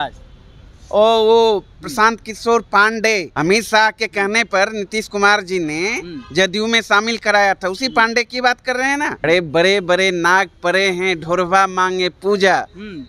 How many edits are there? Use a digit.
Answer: 2